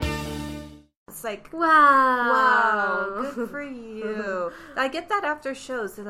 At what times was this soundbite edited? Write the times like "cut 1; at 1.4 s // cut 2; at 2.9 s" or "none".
cut 1; at 1.1 s